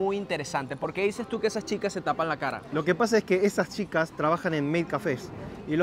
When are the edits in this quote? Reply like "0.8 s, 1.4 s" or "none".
none